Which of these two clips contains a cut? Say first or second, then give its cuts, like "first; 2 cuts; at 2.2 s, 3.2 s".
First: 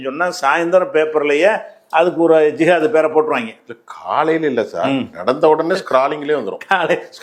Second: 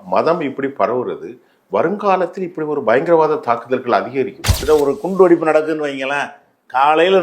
second; 1 cut; at 4.6 s